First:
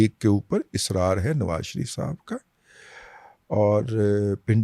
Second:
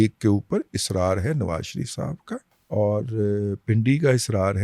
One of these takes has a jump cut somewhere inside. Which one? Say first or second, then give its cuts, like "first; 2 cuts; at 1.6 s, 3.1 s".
second; 1 cut; at 2.5 s